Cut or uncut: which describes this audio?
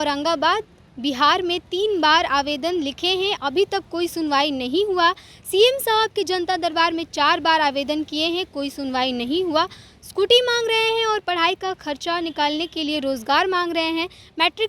uncut